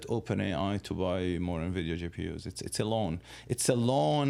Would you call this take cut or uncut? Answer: uncut